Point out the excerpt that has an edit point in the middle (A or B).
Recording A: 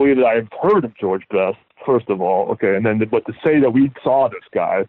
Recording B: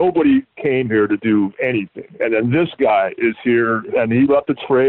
B